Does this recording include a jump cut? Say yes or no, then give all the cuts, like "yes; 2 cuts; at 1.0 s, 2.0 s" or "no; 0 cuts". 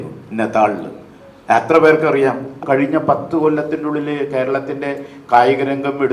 yes; 1 cut; at 2.6 s